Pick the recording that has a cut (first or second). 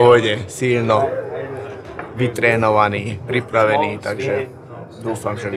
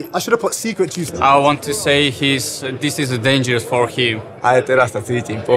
second